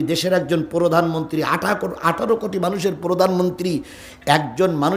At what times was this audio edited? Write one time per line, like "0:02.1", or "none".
none